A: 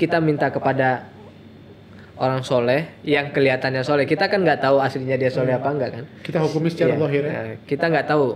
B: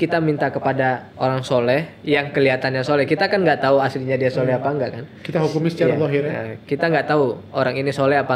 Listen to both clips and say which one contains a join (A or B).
B